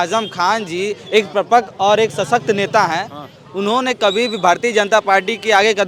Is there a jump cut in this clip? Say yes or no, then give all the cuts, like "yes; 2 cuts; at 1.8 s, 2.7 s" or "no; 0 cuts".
no; 0 cuts